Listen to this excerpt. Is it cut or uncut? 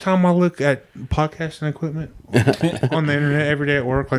uncut